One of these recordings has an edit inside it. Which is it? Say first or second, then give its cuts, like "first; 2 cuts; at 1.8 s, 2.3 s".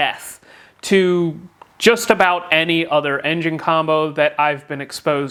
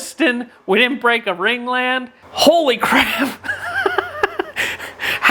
second; 1 cut; at 2.2 s